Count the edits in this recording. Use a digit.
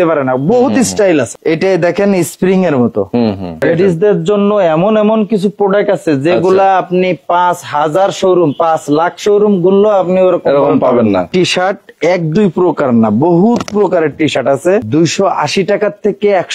4